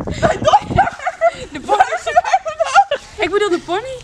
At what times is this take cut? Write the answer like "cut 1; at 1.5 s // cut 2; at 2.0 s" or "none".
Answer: cut 1; at 3.0 s